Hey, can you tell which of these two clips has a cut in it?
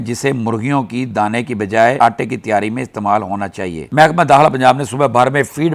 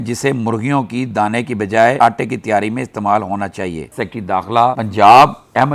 second; 1 cut; at 3.9 s

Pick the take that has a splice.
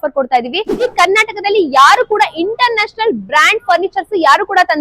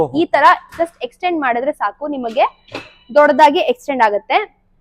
first; 1 cut; at 0.9 s

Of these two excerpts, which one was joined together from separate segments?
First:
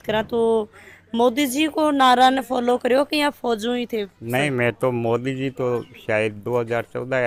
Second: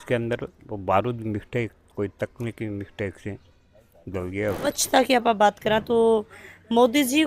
second; 1 cut; at 4.7 s

